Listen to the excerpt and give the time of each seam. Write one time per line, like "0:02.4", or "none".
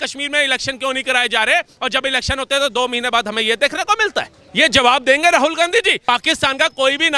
0:04.4
0:06.0

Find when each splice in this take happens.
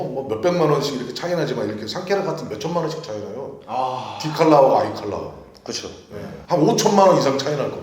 none

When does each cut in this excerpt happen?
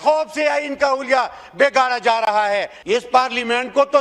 0:02.7

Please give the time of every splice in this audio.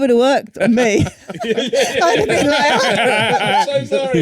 none

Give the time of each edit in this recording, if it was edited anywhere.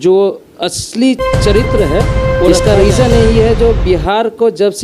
0:02.5

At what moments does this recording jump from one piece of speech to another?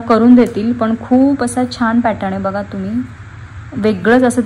none

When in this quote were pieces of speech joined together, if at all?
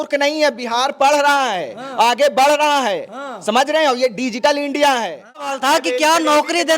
0:05.5

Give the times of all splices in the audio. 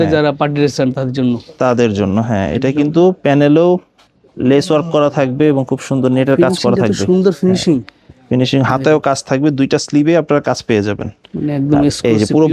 none

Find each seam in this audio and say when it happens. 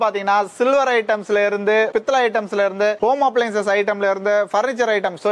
none

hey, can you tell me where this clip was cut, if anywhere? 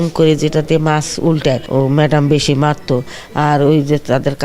0:01.6

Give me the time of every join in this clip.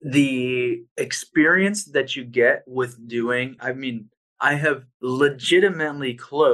0:00.9
0:03.6
0:04.9

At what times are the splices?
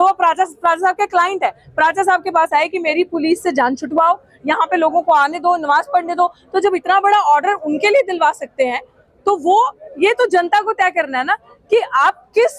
none

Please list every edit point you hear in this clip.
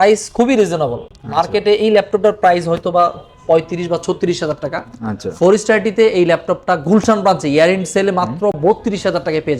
none

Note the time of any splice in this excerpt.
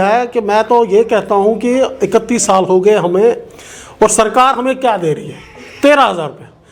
none

